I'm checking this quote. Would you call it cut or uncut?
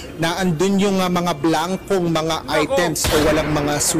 uncut